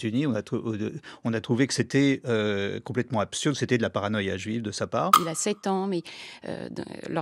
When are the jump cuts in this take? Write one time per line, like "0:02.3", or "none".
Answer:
0:05.2